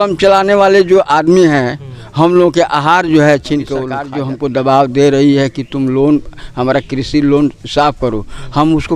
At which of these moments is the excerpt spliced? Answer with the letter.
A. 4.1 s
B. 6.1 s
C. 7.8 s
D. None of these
A